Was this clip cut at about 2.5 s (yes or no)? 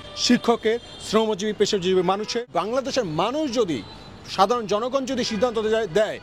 yes